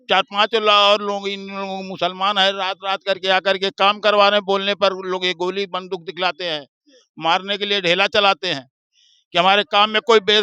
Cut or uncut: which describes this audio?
uncut